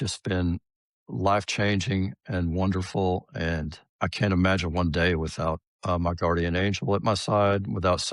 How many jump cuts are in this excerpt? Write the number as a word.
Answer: two